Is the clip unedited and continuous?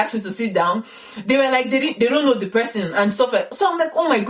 yes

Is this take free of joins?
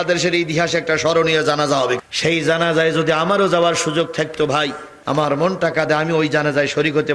yes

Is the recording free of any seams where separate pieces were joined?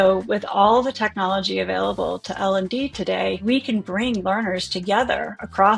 no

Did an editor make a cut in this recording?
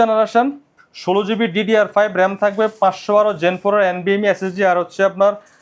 no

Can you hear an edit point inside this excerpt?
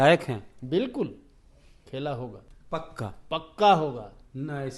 yes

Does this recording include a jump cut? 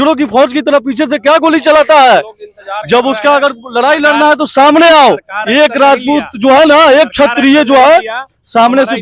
no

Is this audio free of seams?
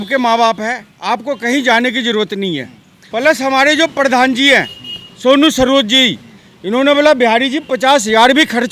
no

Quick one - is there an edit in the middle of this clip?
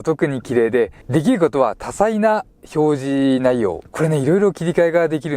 yes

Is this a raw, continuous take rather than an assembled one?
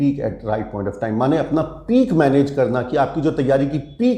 yes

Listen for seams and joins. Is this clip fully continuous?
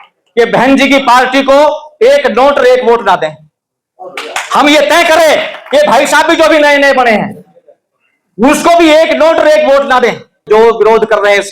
no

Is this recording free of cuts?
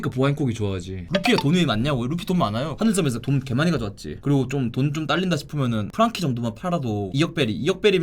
no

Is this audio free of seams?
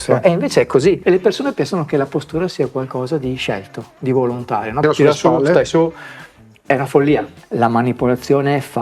no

